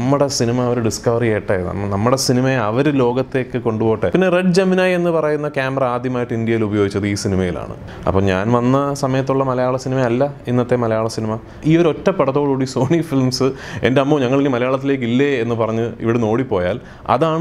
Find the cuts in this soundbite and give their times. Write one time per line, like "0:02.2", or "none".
0:04.1
0:07.8
0:11.5